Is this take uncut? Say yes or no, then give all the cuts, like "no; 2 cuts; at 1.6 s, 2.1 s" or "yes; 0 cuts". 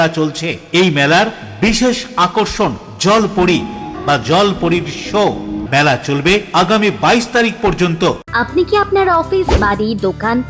no; 3 cuts; at 3.9 s, 5.6 s, 8.2 s